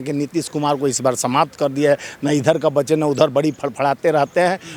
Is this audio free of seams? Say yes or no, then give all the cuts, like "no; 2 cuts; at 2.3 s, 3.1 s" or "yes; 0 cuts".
yes; 0 cuts